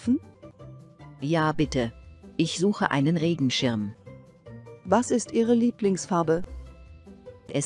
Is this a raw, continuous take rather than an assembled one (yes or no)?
yes